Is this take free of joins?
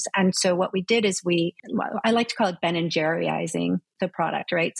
no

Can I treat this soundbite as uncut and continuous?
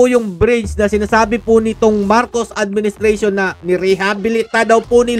yes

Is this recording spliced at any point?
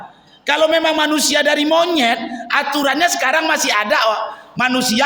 no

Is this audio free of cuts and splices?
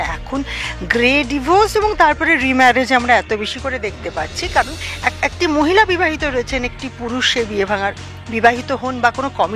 no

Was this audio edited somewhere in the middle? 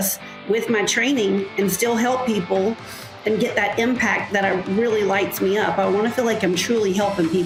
no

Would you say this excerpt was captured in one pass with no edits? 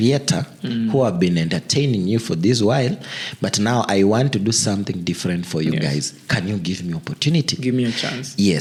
yes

